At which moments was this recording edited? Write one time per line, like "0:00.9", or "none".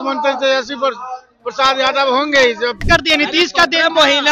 0:02.9

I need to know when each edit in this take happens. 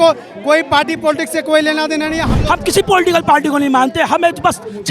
0:02.3

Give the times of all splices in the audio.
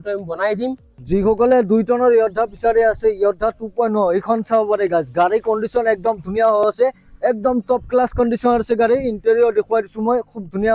0:01.0

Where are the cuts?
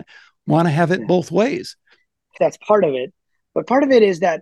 0:02.3

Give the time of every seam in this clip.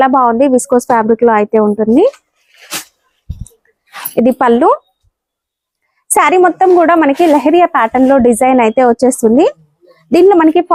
none

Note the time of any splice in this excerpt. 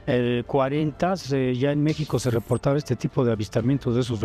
none

